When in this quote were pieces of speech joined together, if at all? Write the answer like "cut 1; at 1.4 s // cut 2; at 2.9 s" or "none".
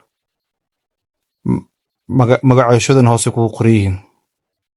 none